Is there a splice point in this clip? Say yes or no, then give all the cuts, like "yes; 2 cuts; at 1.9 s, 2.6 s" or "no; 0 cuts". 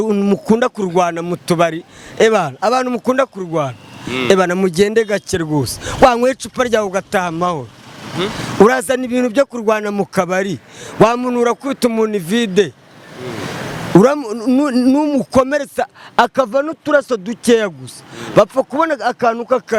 no; 0 cuts